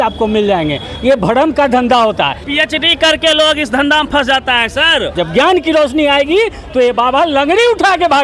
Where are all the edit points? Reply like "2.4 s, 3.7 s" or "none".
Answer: 2.4 s, 5.2 s